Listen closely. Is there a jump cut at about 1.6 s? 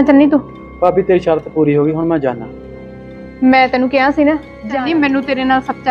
no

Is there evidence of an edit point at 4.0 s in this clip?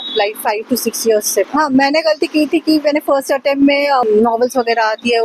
yes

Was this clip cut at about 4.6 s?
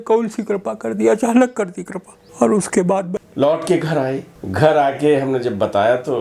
no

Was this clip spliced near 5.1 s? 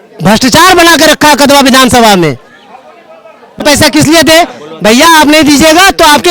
no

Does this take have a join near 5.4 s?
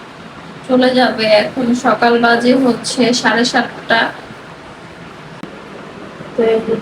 yes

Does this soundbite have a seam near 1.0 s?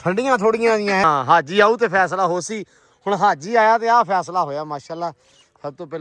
yes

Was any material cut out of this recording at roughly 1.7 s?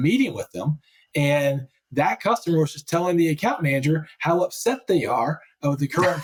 no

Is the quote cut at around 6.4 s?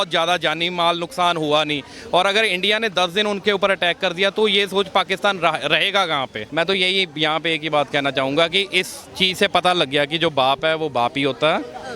yes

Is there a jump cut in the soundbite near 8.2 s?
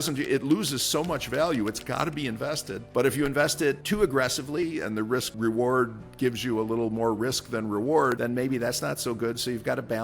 yes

